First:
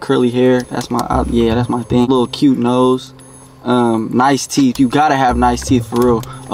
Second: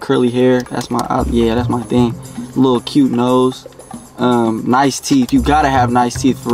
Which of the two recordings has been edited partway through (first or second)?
first